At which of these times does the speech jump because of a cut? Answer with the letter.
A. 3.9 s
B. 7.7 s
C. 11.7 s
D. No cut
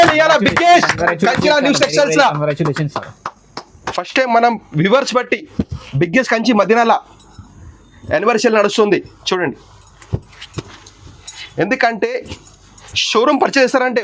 A